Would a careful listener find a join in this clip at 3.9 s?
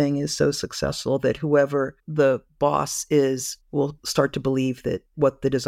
yes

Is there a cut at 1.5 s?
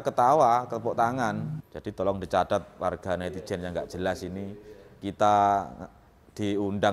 yes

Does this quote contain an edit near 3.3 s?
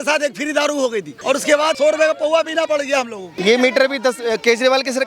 yes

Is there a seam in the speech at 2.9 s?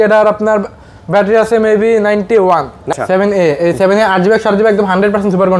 yes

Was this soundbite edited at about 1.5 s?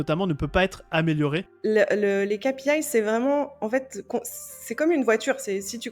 yes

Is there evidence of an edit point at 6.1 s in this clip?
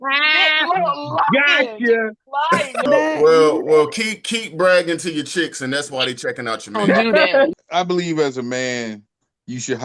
no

